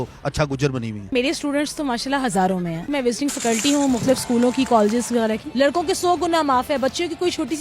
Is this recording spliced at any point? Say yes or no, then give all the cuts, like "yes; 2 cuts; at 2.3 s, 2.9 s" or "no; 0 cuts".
yes; 3 cuts; at 1.1 s, 2.8 s, 5.4 s